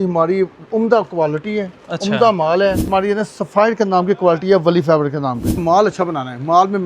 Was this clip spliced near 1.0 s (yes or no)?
no